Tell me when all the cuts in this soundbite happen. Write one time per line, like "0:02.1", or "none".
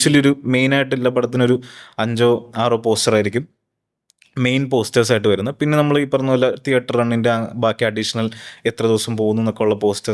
none